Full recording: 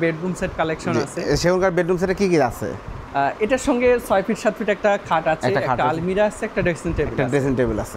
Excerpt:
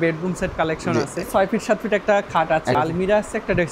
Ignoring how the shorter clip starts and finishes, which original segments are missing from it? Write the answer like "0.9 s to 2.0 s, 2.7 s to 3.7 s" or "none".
1.2 s to 4.0 s, 5.5 s to 5.8 s